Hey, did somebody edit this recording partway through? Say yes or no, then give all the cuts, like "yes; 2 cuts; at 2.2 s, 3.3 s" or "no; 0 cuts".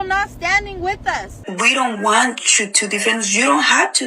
yes; 1 cut; at 1.4 s